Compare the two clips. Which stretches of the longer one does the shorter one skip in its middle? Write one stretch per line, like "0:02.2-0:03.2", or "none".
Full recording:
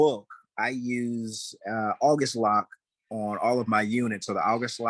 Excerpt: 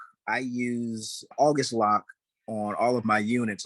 0:01.6-0:02.0